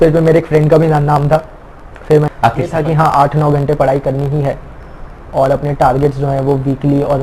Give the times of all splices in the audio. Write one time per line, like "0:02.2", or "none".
0:02.5